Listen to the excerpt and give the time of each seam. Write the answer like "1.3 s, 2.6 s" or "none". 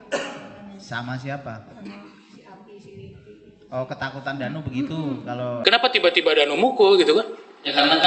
5.6 s